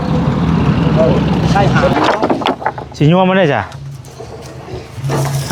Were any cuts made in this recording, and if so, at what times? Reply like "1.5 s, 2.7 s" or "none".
1.9 s